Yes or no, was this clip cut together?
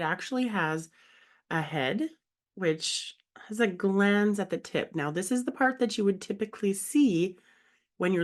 no